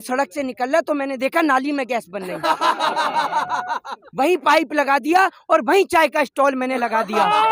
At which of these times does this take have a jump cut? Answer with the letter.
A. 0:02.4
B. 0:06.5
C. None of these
C